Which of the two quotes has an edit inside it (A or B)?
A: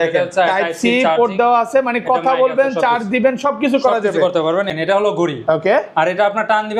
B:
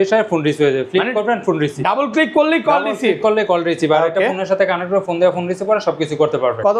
A